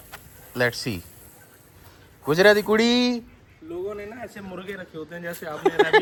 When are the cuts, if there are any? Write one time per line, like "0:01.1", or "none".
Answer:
none